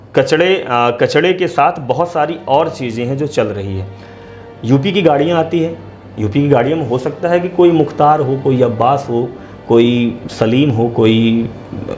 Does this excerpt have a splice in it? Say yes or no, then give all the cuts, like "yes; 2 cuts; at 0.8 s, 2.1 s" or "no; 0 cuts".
no; 0 cuts